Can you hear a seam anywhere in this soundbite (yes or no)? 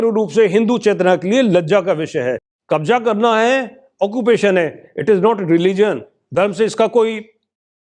yes